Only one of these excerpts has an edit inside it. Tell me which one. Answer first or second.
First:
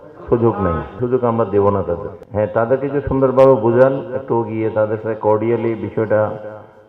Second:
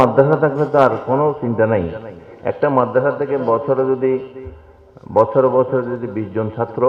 first